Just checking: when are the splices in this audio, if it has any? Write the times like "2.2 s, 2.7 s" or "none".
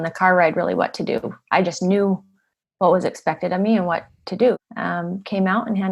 4.6 s